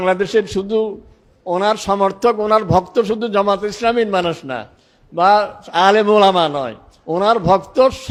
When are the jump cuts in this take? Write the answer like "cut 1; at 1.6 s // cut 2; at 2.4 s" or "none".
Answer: none